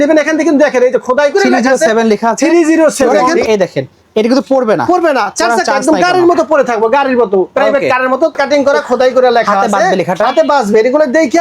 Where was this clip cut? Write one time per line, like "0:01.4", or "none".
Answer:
0:03.1
0:08.4